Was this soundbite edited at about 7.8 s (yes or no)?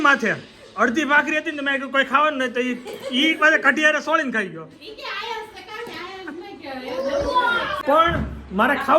yes